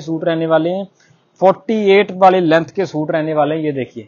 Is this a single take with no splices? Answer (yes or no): yes